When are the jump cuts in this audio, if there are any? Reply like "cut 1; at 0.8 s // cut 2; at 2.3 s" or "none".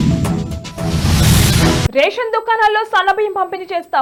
none